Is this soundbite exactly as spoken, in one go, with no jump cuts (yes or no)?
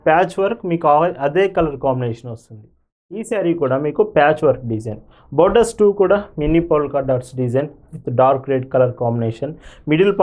no